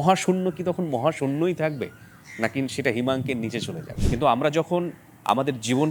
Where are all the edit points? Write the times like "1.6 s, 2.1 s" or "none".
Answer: 3.9 s